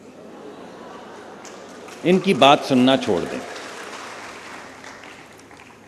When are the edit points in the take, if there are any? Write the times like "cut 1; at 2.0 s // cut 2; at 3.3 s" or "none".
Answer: cut 1; at 4.3 s